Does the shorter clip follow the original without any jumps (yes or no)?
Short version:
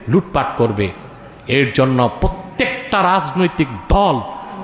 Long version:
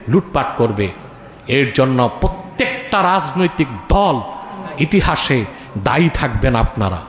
yes